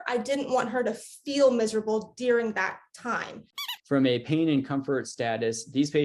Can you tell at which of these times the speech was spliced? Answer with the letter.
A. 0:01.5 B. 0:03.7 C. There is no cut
B